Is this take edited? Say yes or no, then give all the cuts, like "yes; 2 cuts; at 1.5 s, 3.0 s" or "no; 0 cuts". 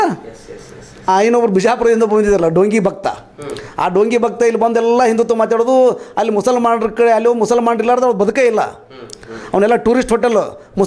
yes; 1 cut; at 1.1 s